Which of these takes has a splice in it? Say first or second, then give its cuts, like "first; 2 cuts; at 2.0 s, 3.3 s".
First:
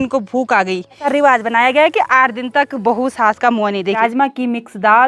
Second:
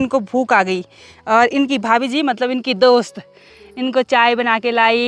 first; 2 cuts; at 1.1 s, 3.9 s